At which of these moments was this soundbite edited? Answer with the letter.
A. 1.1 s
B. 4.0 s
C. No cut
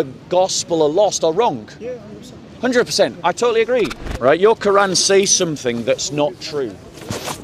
B